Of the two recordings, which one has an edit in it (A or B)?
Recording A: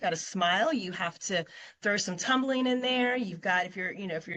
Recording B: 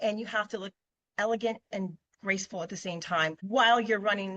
B